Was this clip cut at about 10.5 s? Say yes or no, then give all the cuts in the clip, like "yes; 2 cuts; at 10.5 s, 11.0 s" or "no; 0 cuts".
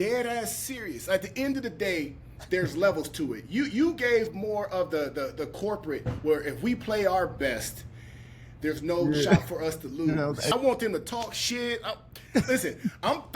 yes; 1 cut; at 10.5 s